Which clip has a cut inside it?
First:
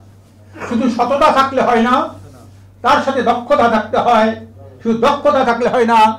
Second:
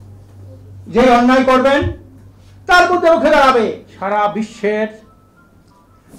second; 1 cut; at 3.9 s

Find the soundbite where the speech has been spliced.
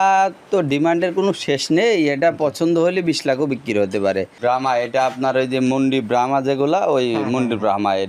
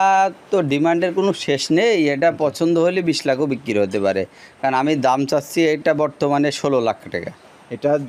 first; 1 cut; at 4.3 s

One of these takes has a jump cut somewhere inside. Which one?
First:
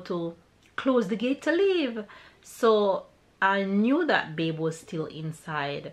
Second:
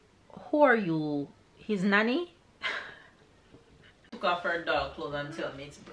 second; 1 cut; at 3.9 s

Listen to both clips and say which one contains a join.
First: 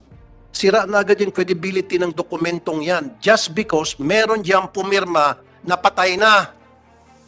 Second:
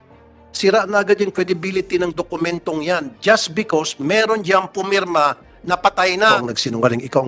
second; 1 cut; at 6.2 s

